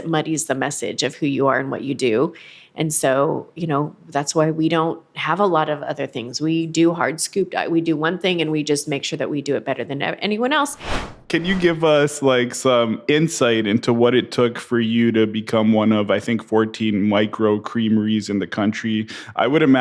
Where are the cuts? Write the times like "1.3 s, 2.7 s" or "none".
11.2 s